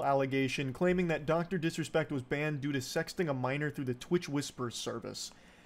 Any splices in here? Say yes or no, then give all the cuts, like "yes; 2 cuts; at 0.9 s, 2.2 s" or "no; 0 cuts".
yes; 1 cut; at 1.1 s